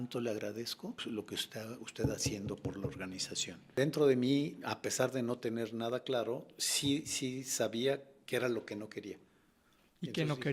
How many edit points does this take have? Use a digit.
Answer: 2